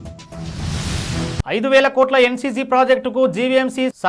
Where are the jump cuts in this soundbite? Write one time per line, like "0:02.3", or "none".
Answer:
0:01.4